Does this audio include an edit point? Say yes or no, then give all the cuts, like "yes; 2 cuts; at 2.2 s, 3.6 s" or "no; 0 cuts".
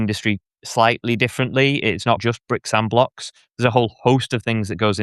yes; 1 cut; at 2.2 s